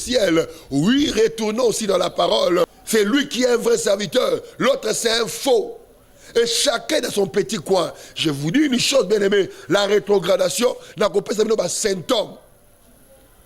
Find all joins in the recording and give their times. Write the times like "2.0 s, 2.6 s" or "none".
2.8 s